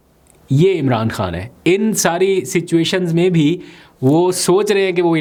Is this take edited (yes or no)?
no